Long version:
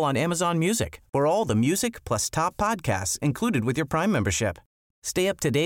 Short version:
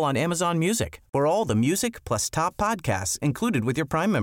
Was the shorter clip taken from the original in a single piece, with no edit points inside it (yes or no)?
yes